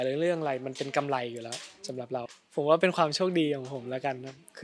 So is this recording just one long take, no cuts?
no; 1 cut; at 2.4 s

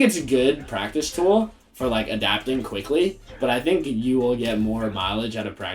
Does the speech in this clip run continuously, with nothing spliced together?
yes; 0 cuts

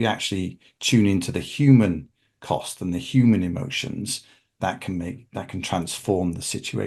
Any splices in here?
no; 0 cuts

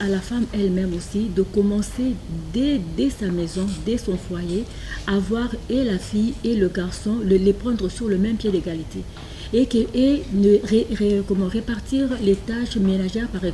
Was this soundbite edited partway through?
no; 0 cuts

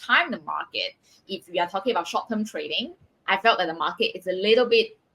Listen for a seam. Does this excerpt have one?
yes; 1 cut; at 1.2 s

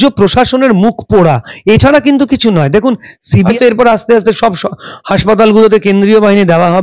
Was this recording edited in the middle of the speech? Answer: yes; 1 cut; at 3.2 s

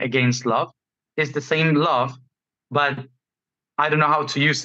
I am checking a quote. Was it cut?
no; 0 cuts

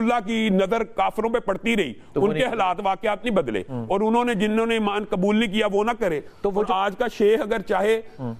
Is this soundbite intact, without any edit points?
yes; 0 cuts

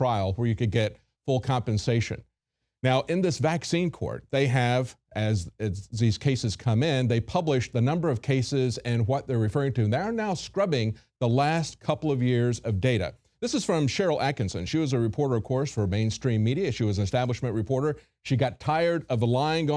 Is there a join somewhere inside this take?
yes; 1 cut; at 4.1 s

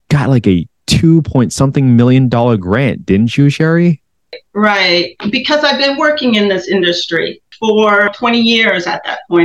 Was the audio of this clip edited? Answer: yes; 4 cuts; at 4.4 s, 5.2 s, 7.4 s, 8.1 s

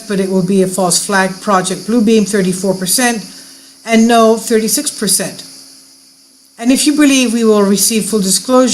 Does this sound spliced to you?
yes; 1 cut; at 6.2 s

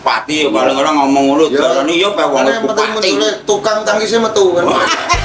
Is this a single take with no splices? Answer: yes; 0 cuts

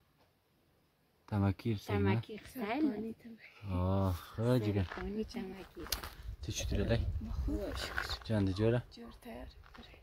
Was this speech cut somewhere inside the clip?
no; 0 cuts

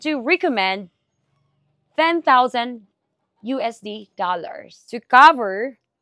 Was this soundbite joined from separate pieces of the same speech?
yes; 1 cut; at 5.0 s

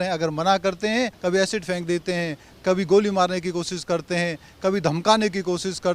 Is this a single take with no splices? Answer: no; 1 cut; at 1.1 s

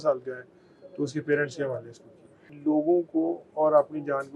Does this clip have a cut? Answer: yes; 1 cut; at 2.5 s

